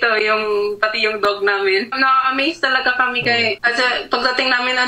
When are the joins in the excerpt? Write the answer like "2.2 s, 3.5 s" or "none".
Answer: 1.9 s, 3.6 s